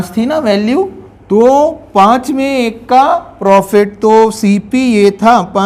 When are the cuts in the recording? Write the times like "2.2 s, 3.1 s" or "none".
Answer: none